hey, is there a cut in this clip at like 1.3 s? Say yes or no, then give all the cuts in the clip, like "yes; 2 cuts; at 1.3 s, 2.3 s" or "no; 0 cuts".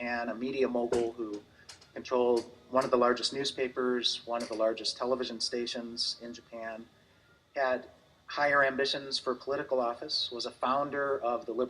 yes; 1 cut; at 1.3 s